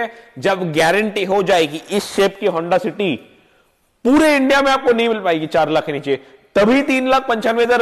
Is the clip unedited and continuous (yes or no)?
yes